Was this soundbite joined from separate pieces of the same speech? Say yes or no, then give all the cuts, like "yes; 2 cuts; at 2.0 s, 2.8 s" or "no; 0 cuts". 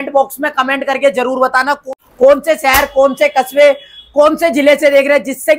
yes; 1 cut; at 2.0 s